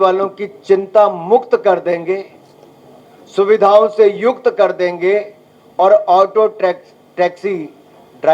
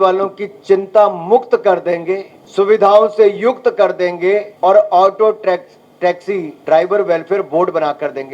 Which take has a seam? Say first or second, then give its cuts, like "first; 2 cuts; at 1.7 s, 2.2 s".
second; 3 cuts; at 2.4 s, 4.5 s, 6.5 s